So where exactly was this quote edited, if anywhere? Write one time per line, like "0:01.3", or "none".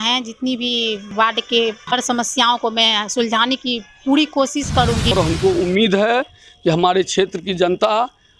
0:01.0
0:01.8
0:05.1